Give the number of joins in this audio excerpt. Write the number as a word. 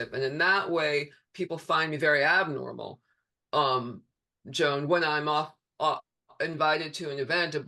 zero